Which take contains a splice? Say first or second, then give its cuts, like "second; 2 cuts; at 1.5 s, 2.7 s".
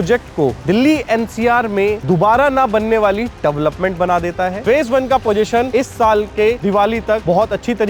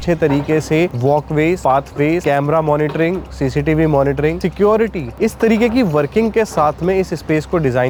first; 1 cut; at 4.6 s